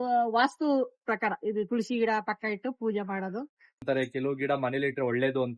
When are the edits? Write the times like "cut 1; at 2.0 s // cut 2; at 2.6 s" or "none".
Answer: cut 1; at 3.8 s